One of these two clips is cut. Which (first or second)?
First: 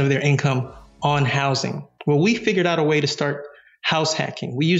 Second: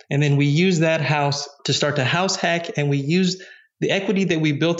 second